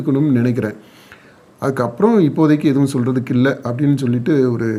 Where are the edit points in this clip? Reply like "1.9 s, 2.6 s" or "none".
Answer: none

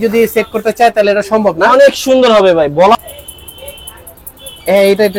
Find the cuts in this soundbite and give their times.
3.0 s

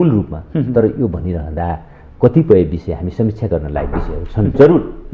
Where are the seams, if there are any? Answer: none

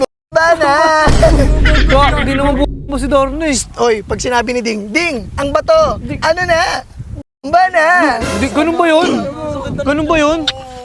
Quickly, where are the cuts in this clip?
none

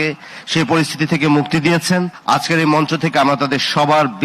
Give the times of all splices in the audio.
2.1 s

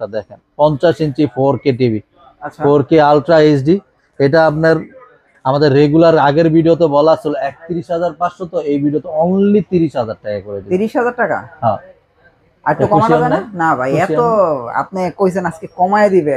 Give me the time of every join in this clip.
none

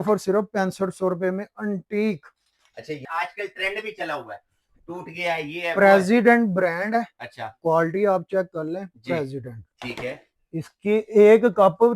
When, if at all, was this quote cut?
3.0 s

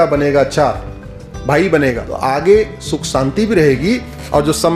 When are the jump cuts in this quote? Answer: 2.1 s

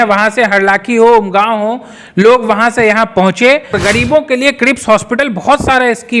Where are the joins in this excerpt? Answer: 3.8 s

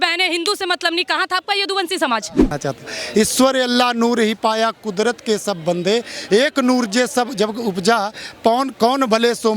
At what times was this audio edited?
2.5 s

